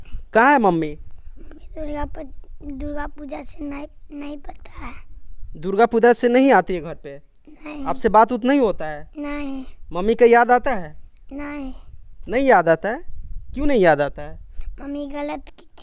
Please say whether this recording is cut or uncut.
uncut